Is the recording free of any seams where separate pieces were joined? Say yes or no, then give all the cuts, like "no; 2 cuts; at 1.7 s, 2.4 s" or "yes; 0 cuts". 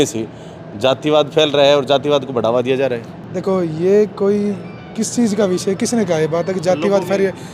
yes; 0 cuts